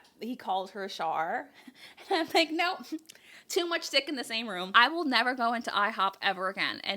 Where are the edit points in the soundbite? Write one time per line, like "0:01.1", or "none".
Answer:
0:04.6